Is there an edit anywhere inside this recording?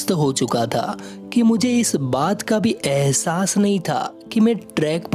no; 0 cuts

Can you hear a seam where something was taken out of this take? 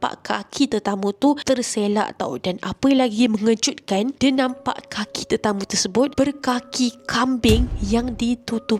no; 0 cuts

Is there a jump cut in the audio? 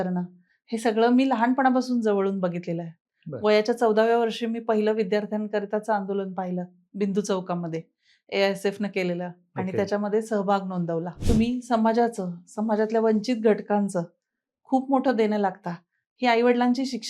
yes; 1 cut; at 11.1 s

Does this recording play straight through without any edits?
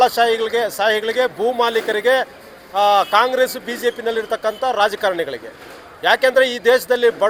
yes; 0 cuts

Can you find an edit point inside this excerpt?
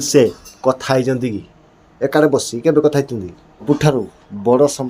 yes; 1 cut; at 3.6 s

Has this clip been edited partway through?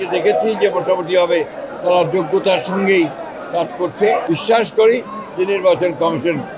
yes; 1 cut; at 4.2 s

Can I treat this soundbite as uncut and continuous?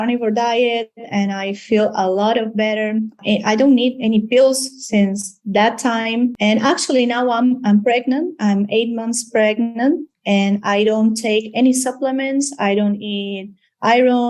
no; 2 cuts; at 3.2 s, 6.3 s

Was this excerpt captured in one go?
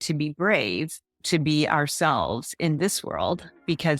yes; 0 cuts

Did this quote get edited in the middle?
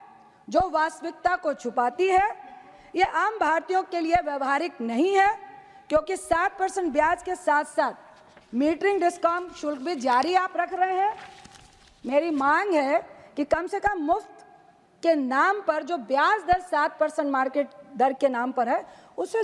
no; 0 cuts

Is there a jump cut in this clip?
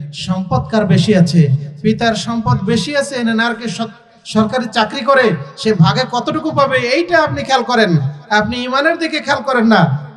no; 0 cuts

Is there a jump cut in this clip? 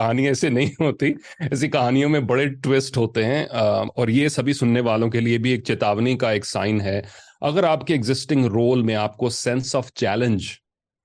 yes; 1 cut; at 3.9 s

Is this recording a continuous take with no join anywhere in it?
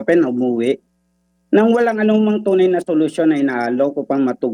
yes; 0 cuts

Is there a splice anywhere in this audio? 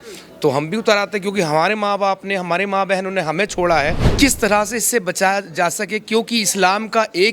yes; 1 cut; at 4.0 s

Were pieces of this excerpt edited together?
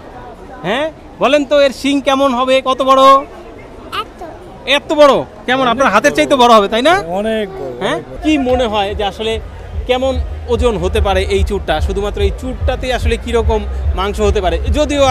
yes; 1 cut; at 8.1 s

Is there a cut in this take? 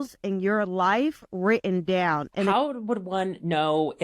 yes; 1 cut; at 2.5 s

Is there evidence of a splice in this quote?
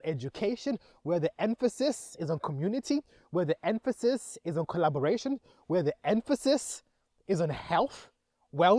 no; 0 cuts

